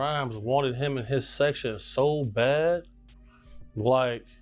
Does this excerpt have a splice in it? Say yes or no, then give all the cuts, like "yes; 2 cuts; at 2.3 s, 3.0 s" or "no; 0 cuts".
no; 0 cuts